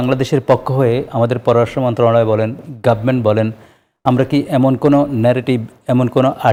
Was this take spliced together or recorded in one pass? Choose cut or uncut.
uncut